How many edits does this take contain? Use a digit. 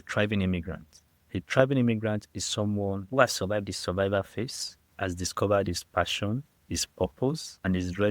1